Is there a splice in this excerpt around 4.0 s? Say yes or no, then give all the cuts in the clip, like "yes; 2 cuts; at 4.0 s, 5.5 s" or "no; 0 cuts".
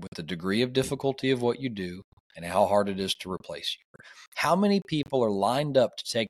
yes; 1 cut; at 4.0 s